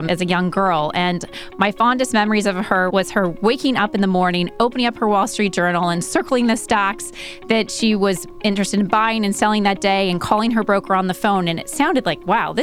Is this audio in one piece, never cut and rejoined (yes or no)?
yes